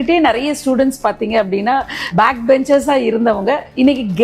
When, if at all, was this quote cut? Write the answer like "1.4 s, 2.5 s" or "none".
2.1 s